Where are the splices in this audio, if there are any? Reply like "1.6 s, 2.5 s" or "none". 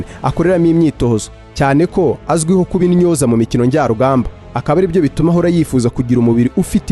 none